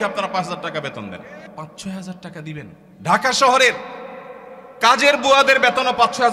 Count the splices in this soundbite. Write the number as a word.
two